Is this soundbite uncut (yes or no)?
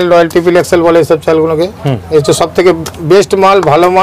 yes